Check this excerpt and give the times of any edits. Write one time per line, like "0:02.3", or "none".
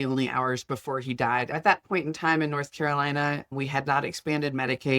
0:01.5